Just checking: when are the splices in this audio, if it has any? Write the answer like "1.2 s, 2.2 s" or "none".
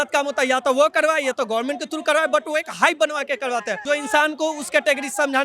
3.8 s